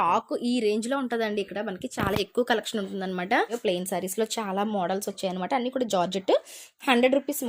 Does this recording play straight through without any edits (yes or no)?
no